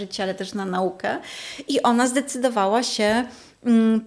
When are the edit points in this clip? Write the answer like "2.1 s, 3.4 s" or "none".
none